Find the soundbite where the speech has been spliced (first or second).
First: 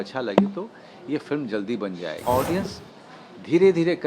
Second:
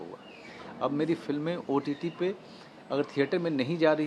first